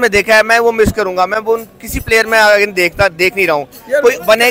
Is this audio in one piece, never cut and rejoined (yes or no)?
yes